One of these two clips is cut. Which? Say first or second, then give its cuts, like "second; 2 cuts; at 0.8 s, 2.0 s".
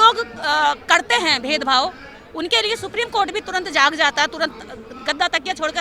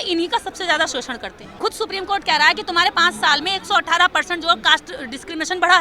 second; 1 cut; at 1.6 s